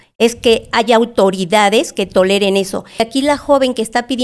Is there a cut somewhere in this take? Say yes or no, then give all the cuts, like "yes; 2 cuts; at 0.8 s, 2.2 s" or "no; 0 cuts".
yes; 1 cut; at 3.0 s